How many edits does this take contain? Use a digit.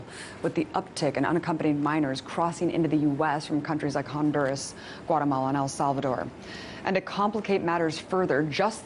1